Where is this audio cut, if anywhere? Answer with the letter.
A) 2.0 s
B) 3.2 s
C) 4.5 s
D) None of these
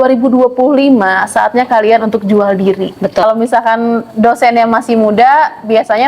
B